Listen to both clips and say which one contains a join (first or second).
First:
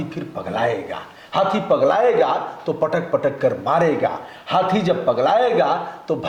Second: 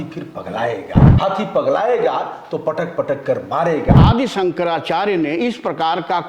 second